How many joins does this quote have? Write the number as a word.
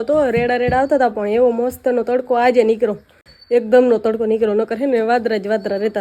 zero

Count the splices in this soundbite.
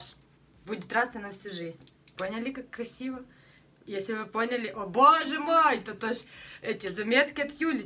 zero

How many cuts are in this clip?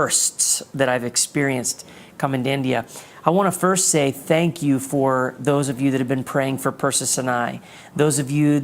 one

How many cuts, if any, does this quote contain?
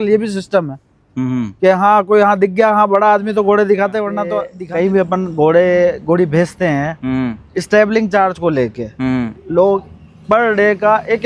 one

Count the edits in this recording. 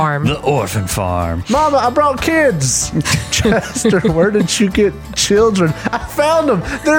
zero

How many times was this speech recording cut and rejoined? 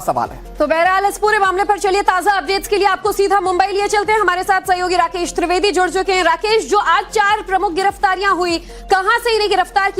one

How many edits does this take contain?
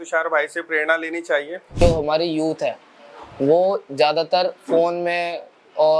one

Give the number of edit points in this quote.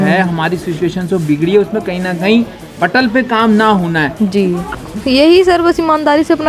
one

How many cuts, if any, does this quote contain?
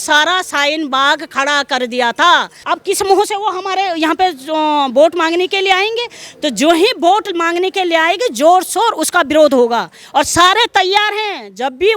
one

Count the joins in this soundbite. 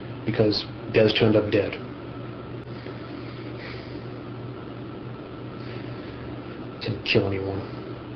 one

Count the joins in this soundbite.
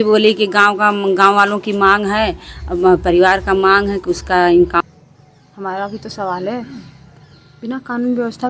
one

